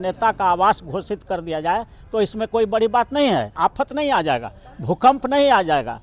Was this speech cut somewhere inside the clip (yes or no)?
yes